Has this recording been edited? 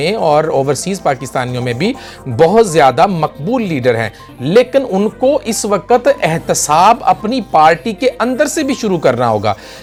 no; 0 cuts

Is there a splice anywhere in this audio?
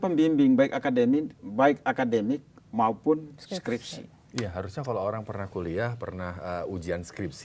no; 0 cuts

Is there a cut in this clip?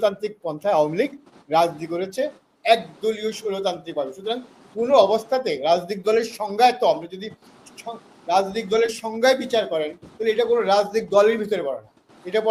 no; 0 cuts

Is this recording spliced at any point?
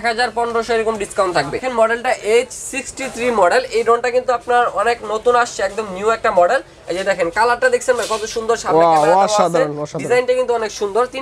no; 0 cuts

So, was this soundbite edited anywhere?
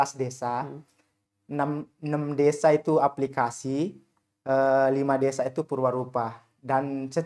no; 0 cuts

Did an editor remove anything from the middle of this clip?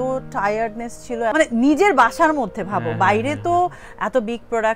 yes; 1 cut; at 1.3 s

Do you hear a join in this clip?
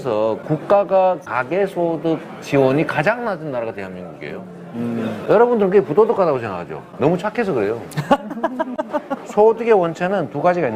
no; 0 cuts

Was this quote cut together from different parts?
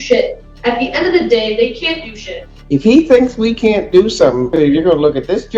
yes; 2 cuts; at 2.5 s, 4.5 s

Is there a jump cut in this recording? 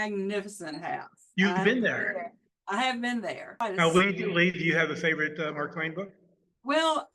yes; 1 cut; at 3.6 s

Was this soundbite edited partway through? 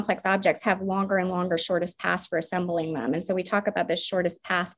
no; 0 cuts

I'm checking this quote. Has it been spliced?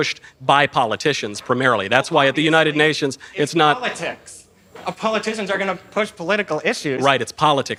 no; 0 cuts

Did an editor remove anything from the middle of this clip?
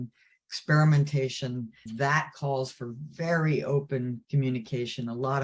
yes; 1 cut; at 1.8 s

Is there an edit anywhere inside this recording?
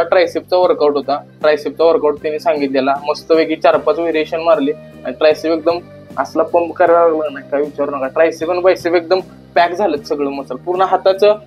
no; 0 cuts

